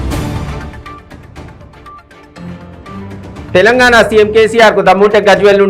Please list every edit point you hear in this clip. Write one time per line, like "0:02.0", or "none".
0:03.2